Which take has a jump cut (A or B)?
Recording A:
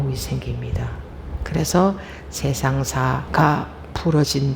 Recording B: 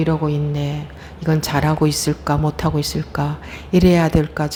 A